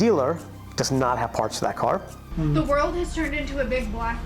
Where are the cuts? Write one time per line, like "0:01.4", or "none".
0:02.3